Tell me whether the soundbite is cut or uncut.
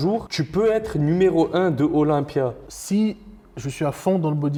uncut